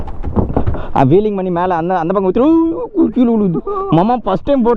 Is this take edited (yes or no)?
no